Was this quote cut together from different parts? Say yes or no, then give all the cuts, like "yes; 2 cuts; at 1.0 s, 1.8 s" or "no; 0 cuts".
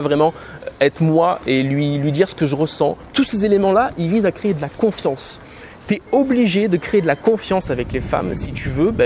yes; 1 cut; at 3.0 s